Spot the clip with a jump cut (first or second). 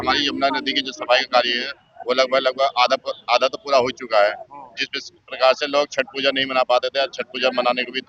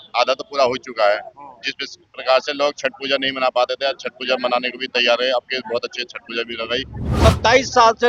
second